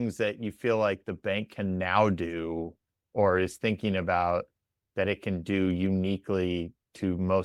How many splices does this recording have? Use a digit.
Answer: 0